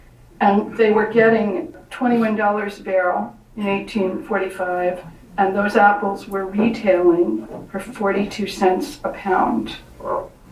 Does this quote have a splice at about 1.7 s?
yes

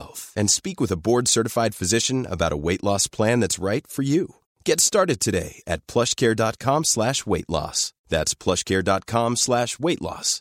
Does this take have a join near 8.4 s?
no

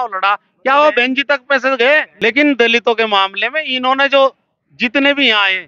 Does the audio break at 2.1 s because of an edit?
yes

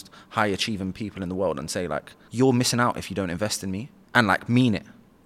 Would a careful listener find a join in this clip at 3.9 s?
yes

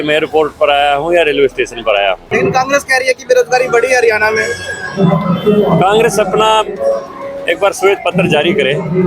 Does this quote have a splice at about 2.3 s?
yes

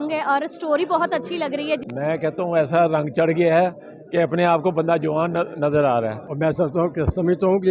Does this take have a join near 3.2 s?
no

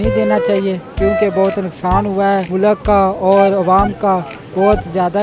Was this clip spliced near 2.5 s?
yes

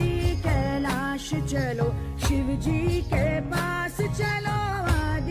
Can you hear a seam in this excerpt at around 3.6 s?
no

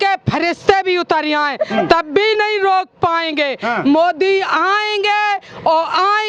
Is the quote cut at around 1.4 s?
no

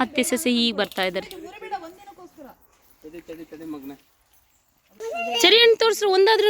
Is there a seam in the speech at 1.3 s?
no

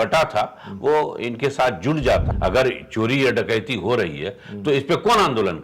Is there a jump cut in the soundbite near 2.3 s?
yes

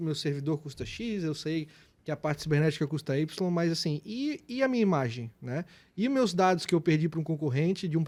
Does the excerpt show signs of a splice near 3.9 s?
no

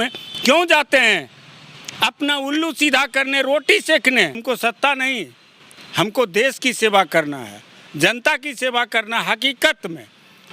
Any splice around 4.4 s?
yes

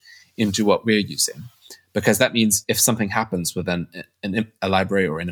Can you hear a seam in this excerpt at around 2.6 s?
yes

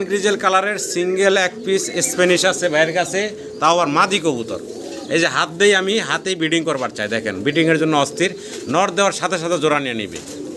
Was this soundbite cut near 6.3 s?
no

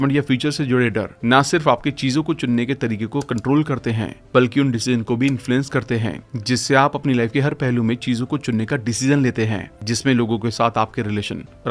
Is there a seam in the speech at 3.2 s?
no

